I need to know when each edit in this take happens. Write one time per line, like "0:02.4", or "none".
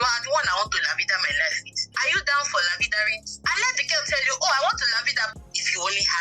0:05.3